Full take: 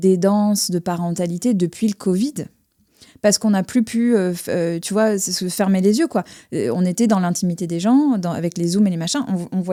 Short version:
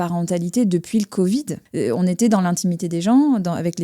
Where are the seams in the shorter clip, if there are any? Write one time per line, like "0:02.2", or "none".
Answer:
0:01.6